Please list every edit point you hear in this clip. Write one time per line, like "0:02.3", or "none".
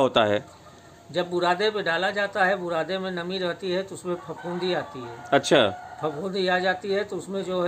none